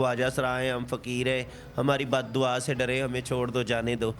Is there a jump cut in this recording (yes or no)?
no